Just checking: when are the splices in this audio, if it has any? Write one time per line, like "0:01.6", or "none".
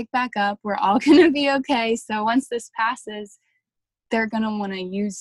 none